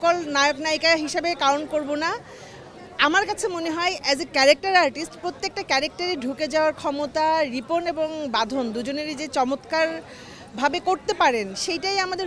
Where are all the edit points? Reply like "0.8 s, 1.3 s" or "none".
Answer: none